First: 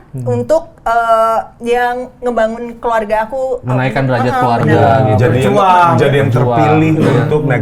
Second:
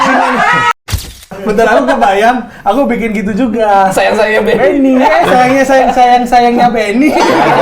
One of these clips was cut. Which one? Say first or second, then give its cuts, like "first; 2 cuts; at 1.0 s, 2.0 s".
second; 1 cut; at 1.1 s